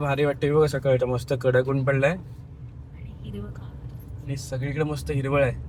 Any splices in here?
no; 0 cuts

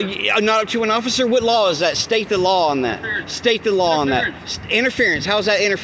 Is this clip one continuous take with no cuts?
yes; 0 cuts

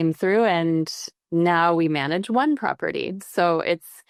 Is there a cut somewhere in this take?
no; 0 cuts

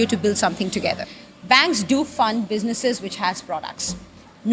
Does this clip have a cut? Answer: yes; 1 cut; at 1.1 s

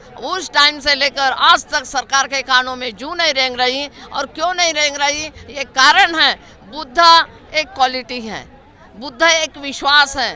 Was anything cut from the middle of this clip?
no; 0 cuts

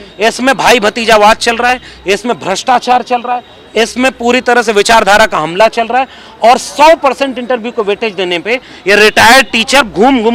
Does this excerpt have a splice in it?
no; 0 cuts

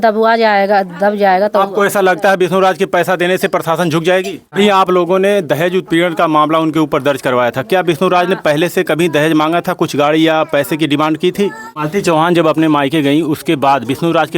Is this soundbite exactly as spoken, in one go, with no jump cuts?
no; 2 cuts; at 4.5 s, 11.8 s

